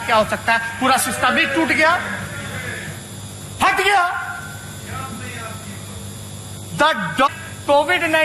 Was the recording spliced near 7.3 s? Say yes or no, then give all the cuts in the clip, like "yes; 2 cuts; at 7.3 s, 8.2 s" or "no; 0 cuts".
yes; 1 cut; at 7.3 s